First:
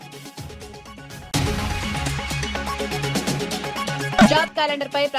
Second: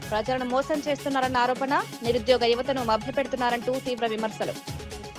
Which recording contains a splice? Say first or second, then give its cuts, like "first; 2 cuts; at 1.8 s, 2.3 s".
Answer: first; 2 cuts; at 1.3 s, 4.2 s